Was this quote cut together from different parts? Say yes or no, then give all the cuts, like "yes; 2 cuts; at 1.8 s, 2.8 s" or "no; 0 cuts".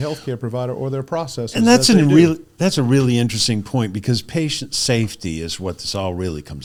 no; 0 cuts